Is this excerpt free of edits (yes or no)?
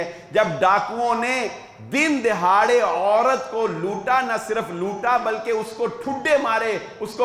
yes